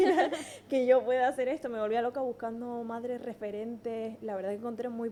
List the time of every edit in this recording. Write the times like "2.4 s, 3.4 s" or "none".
none